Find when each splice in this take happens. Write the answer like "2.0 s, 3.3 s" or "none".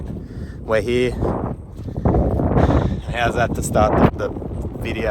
4.1 s